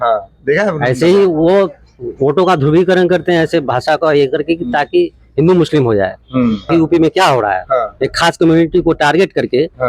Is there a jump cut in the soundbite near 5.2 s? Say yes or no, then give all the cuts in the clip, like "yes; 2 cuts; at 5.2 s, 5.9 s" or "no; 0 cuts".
no; 1 cut; at 6.7 s